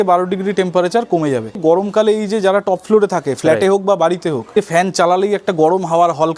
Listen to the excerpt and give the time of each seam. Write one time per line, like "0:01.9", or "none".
0:01.6
0:04.5